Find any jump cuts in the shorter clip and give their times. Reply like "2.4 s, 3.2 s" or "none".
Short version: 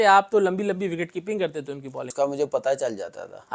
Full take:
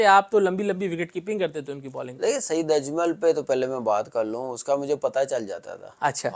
2.1 s